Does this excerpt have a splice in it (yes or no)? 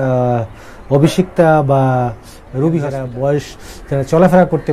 yes